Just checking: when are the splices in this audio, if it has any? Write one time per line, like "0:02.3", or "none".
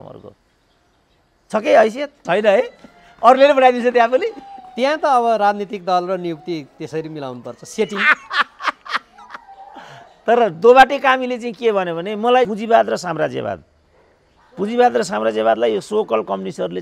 0:02.1
0:12.5